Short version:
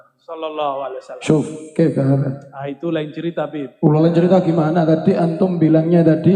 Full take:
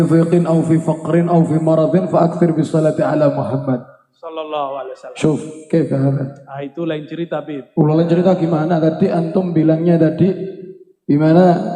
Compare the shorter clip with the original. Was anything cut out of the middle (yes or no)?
no